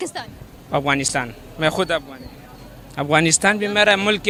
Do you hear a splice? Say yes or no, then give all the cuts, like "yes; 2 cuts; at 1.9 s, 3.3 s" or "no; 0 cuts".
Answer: no; 0 cuts